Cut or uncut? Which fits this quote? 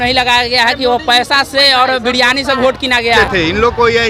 cut